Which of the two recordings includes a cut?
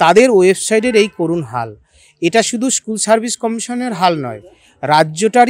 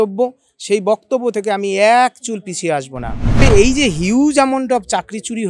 second; 1 cut; at 3.4 s

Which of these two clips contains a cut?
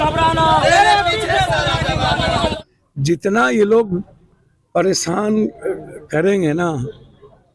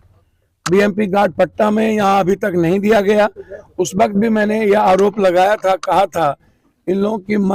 first; 1 cut; at 2.5 s

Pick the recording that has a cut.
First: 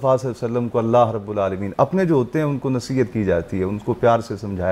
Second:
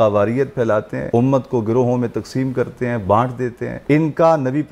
second; 2 cuts; at 1.0 s, 3.7 s

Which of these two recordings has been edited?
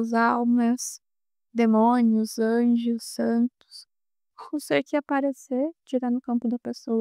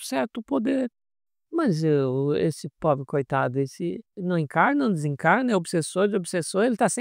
second; 1 cut; at 1.0 s

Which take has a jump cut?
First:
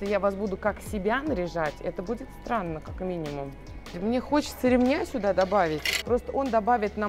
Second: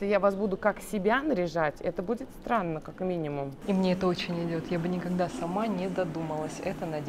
second; 1 cut; at 3.6 s

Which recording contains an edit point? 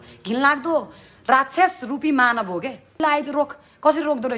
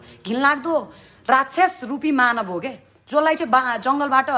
first; 1 cut; at 3.0 s

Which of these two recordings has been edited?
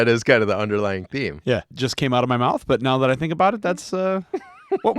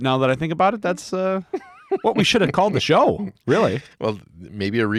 first; 1 cut; at 1.7 s

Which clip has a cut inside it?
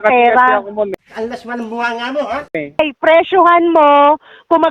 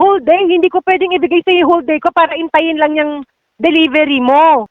first; 1 cut; at 2.8 s

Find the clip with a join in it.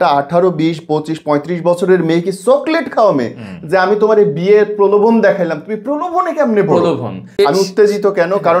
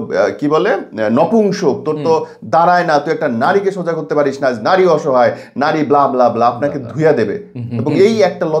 first; 1 cut; at 7.3 s

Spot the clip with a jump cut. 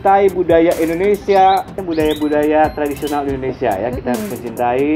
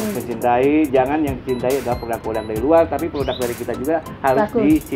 first; 1 cut; at 1.8 s

